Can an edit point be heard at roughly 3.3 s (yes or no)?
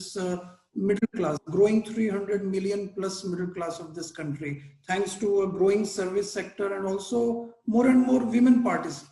no